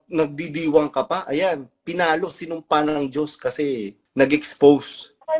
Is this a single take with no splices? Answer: no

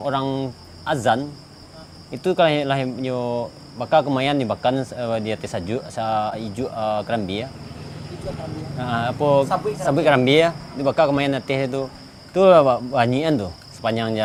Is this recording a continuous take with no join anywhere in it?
yes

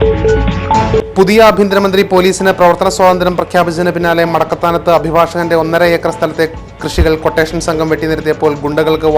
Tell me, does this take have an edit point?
yes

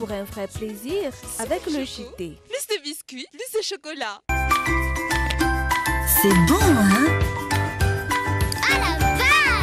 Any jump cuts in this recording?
yes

